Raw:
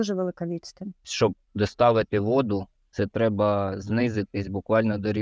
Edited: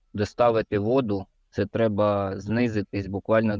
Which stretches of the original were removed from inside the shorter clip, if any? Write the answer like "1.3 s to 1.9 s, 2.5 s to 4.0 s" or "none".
none